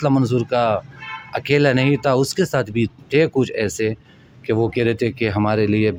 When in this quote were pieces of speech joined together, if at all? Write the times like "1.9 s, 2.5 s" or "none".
none